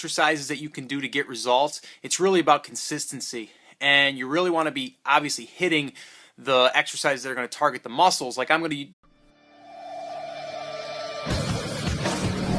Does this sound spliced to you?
no; 0 cuts

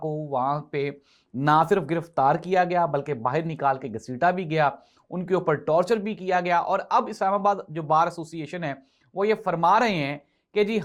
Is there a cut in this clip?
no; 0 cuts

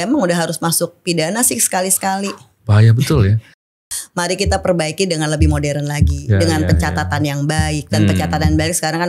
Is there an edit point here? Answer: yes; 1 cut; at 3.7 s

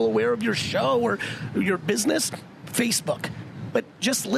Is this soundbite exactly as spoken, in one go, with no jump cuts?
yes; 0 cuts

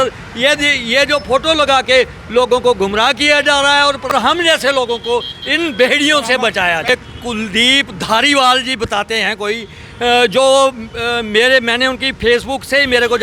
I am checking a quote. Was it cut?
yes; 2 cuts; at 4.1 s, 6.9 s

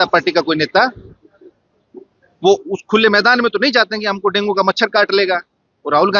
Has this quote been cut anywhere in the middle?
no; 0 cuts

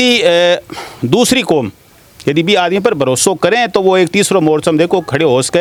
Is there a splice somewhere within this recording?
no; 0 cuts

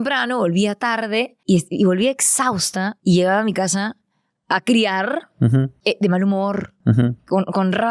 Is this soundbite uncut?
no; 3 cuts; at 1.3 s, 2.9 s, 5.8 s

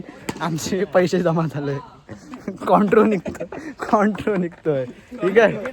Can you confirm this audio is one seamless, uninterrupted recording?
yes; 0 cuts

